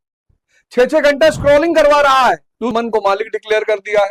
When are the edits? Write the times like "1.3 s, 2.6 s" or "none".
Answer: 2.7 s